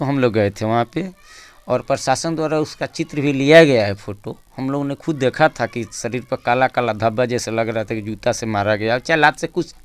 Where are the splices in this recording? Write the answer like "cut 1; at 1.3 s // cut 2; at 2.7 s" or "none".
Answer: none